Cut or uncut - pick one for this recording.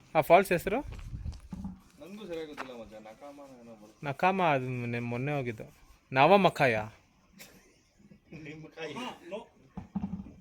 uncut